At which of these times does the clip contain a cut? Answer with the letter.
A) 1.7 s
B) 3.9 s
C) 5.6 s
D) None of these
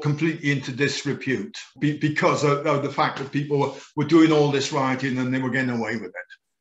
A